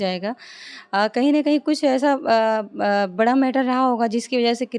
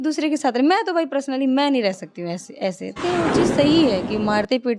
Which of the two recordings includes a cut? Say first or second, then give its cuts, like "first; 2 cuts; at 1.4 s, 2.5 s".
second; 1 cut; at 3.0 s